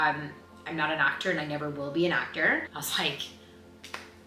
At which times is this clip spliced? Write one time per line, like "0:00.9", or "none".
none